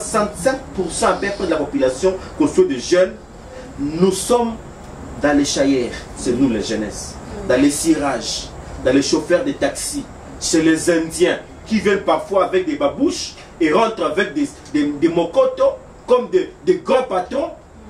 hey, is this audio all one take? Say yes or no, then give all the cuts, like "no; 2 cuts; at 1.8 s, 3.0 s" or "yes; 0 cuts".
yes; 0 cuts